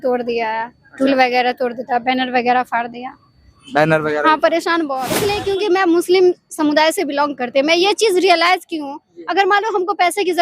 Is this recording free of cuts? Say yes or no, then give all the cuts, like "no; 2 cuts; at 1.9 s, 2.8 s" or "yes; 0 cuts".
no; 1 cut; at 5.1 s